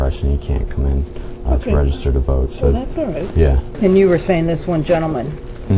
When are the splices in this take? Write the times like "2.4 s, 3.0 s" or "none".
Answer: 3.7 s